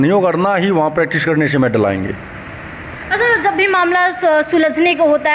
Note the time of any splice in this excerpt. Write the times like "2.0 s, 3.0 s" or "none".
none

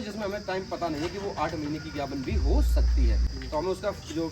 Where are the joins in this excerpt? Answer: 3.3 s

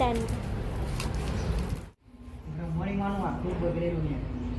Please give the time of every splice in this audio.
1.8 s

